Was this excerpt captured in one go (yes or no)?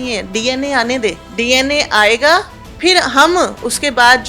no